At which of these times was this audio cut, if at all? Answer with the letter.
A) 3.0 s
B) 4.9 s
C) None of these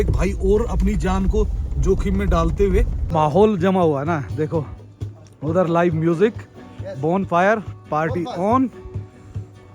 A